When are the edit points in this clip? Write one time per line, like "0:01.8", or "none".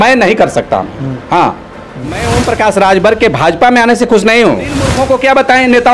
0:02.2
0:05.0